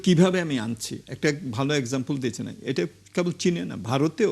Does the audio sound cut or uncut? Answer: uncut